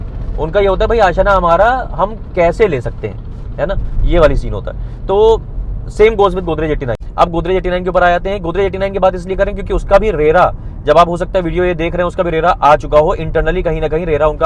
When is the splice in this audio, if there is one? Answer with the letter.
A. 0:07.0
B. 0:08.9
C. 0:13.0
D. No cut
A